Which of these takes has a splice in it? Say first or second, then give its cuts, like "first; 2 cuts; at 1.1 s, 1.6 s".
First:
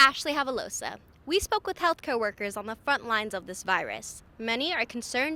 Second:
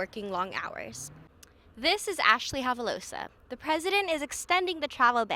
second; 1 cut; at 1.3 s